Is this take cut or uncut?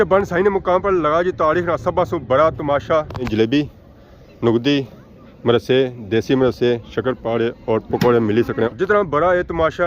cut